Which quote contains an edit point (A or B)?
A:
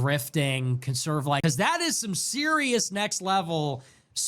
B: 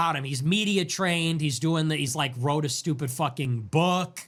A